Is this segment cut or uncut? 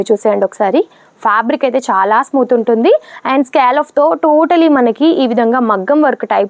uncut